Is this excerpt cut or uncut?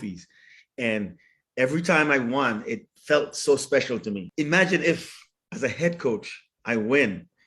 cut